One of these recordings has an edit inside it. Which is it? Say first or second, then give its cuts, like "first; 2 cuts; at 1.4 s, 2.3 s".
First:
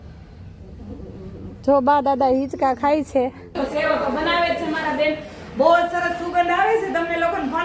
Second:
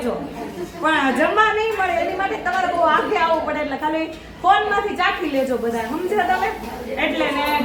first; 1 cut; at 3.5 s